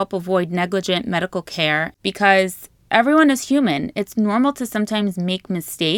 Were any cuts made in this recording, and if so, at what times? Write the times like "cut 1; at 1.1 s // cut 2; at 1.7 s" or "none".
cut 1; at 2.0 s